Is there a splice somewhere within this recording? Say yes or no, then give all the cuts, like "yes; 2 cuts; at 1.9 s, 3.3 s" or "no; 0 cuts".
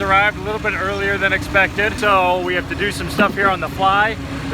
yes; 1 cut; at 2.0 s